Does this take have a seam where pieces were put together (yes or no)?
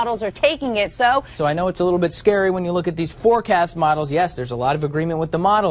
yes